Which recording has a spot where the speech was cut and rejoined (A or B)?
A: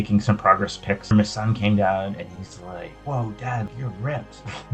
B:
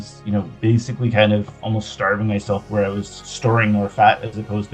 A